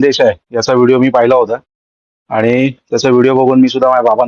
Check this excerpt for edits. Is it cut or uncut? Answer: uncut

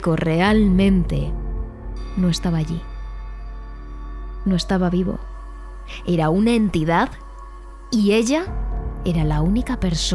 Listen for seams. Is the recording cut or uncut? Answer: uncut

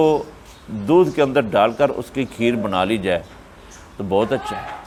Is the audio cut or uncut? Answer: uncut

